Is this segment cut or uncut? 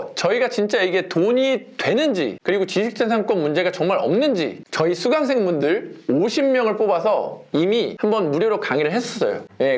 uncut